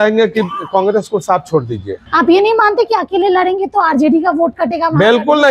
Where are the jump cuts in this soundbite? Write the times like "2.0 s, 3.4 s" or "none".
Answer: 2.0 s

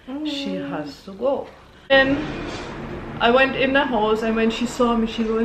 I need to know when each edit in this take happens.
1.9 s

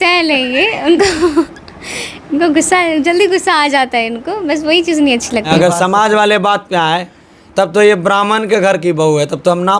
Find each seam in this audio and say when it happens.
5.5 s

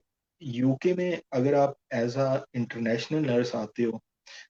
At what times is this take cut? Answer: none

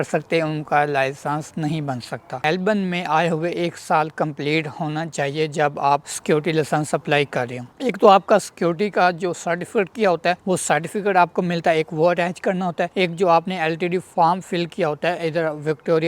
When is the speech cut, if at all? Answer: 2.4 s, 7.7 s

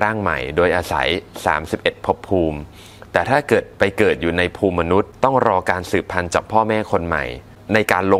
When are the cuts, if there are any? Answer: 5.1 s

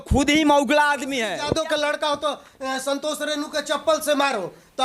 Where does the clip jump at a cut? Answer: 1.3 s

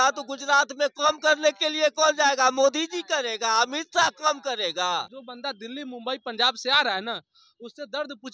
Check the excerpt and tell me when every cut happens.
5.2 s

